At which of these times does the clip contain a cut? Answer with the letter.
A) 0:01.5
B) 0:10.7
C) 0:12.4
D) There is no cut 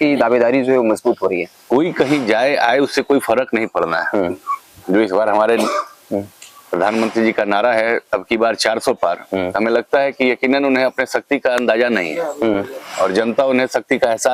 A